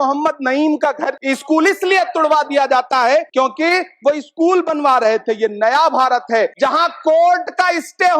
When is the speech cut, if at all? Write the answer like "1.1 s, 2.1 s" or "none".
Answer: 1.2 s, 3.3 s, 6.5 s